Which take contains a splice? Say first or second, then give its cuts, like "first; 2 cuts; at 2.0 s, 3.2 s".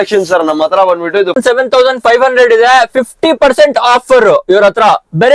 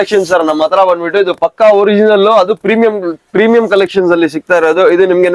first; 1 cut; at 1.4 s